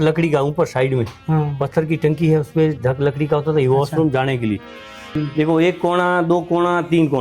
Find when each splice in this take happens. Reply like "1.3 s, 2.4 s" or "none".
5.2 s